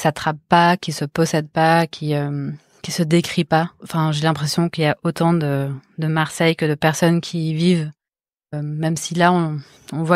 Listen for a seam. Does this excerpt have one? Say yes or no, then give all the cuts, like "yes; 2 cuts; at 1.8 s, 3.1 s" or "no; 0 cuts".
yes; 1 cut; at 8.5 s